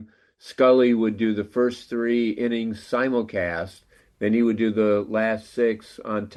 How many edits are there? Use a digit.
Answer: 0